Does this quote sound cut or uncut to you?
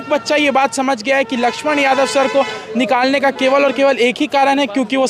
uncut